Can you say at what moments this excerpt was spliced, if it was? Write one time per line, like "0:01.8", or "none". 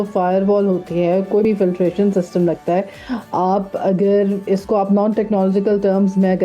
0:01.4